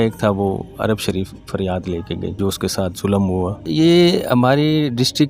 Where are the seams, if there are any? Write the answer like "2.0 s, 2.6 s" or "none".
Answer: 2.4 s, 3.6 s